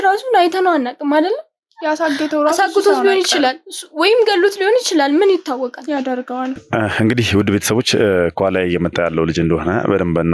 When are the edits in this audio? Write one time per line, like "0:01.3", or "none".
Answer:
0:06.6